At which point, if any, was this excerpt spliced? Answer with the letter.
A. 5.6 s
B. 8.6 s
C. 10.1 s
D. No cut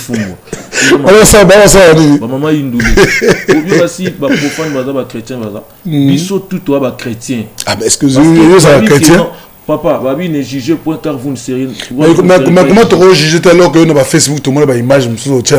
D